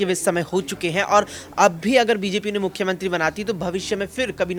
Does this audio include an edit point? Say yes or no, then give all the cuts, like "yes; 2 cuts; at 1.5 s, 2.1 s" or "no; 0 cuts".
no; 0 cuts